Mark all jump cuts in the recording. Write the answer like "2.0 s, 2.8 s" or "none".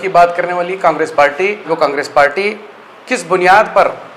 1.7 s